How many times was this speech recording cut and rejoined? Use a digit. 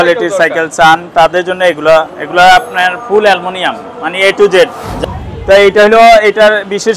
1